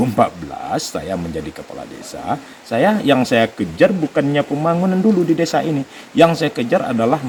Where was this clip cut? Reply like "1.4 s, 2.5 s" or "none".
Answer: none

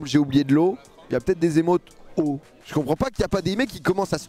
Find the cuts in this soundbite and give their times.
2.6 s

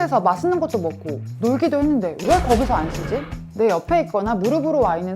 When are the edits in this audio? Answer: 3.4 s

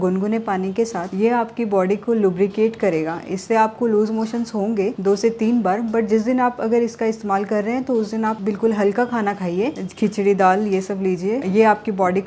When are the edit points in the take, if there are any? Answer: none

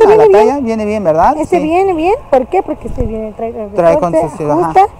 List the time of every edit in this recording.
none

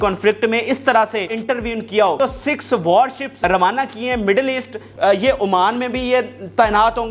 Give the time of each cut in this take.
1.3 s, 2.2 s, 3.3 s, 4.8 s

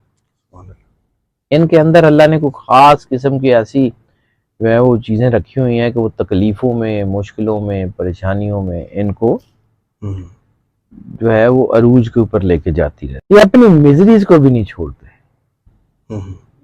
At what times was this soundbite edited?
13.1 s

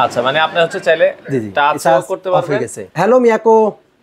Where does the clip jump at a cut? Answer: 2.8 s

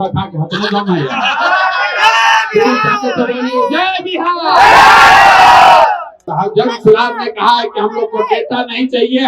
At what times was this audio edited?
6.1 s

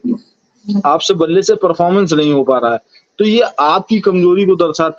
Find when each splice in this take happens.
none

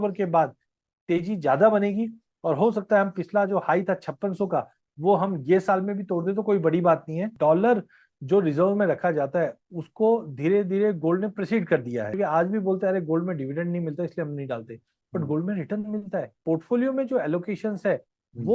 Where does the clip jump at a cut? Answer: 7.3 s, 12.1 s, 16.4 s

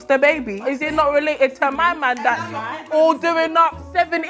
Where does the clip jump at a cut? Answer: none

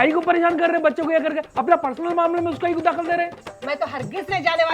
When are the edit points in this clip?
3.5 s

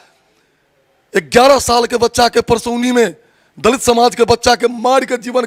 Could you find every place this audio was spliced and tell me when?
none

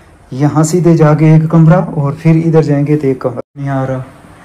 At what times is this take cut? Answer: 3.4 s

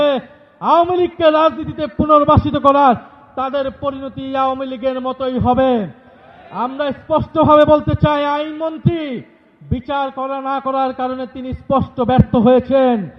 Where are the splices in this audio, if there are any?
none

